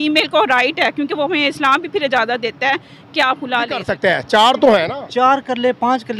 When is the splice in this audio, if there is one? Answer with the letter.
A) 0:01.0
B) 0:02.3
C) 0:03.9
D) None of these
C